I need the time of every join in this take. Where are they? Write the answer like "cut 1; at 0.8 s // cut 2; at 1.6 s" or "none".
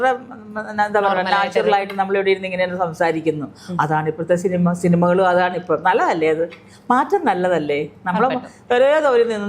none